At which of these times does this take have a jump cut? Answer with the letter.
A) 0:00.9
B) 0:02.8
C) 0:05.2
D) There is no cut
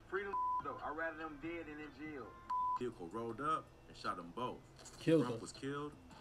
B